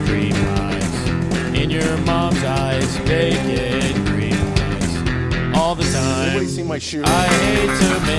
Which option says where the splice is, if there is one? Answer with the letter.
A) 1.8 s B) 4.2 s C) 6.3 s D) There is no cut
D